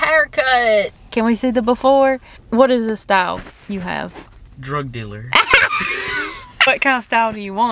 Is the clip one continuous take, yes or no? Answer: no